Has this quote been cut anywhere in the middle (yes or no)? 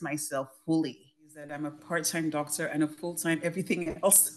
yes